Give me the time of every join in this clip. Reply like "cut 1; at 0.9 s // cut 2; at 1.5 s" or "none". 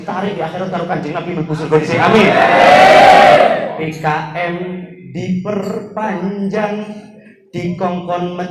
cut 1; at 3.8 s